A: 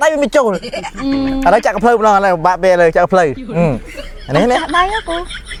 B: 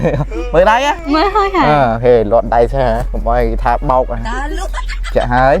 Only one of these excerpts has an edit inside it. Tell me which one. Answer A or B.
B